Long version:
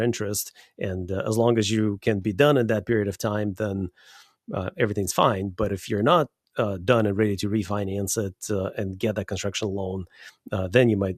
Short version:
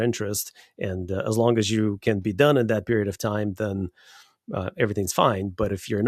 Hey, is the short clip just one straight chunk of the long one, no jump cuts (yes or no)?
yes